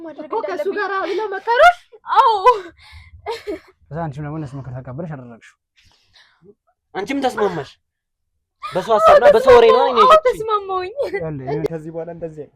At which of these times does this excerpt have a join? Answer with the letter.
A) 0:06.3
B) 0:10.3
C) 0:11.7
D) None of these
C